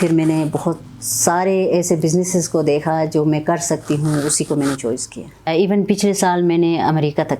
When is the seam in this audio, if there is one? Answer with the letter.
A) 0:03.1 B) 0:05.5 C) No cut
B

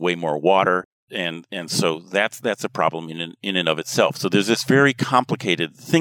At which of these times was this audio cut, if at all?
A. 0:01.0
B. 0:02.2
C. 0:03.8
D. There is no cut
A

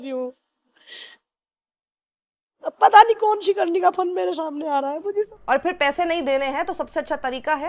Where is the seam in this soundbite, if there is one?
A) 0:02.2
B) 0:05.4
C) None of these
B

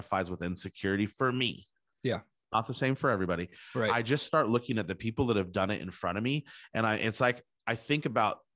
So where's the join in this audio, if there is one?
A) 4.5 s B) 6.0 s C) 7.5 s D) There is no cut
D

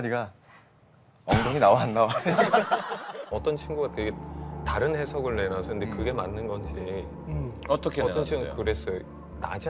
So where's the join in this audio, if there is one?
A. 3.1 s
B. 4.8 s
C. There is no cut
A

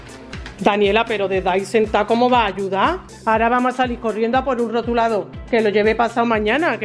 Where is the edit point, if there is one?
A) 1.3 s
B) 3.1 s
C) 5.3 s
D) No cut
B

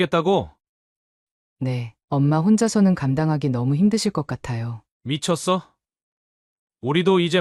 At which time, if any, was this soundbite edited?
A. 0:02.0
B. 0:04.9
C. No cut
C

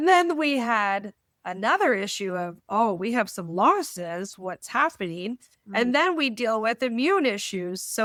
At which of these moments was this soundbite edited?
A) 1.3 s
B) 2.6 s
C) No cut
C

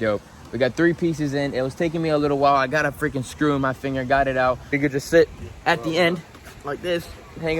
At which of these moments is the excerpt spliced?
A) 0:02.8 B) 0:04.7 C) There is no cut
B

